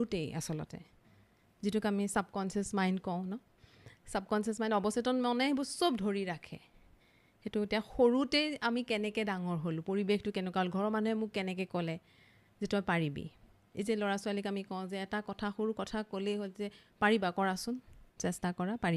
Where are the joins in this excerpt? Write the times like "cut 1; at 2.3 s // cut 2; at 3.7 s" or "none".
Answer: none